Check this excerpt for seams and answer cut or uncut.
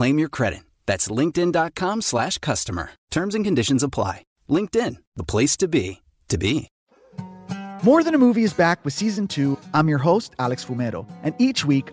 cut